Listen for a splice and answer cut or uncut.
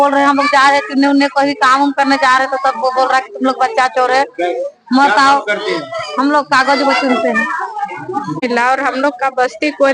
cut